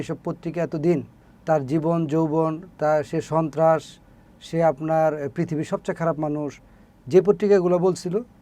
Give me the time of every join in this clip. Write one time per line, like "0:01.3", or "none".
none